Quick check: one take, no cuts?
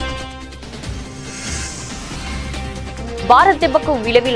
yes; 0 cuts

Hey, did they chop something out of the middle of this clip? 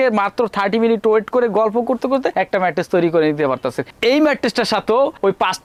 no; 0 cuts

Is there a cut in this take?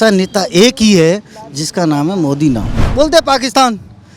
yes; 1 cut; at 2.8 s

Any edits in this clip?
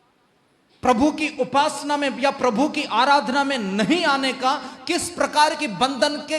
no; 0 cuts

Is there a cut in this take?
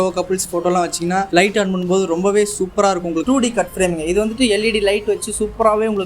yes; 2 cuts; at 1.3 s, 3.2 s

